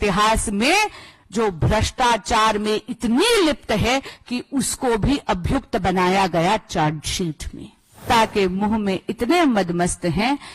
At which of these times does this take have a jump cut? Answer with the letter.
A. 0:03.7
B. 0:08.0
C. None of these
B